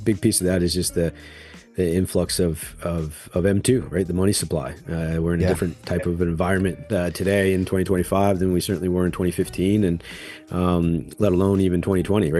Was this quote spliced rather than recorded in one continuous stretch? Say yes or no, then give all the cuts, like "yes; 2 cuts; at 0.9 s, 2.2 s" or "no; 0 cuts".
no; 0 cuts